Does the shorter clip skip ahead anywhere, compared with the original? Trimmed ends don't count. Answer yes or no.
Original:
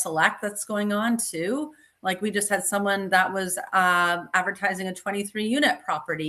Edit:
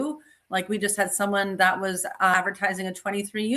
yes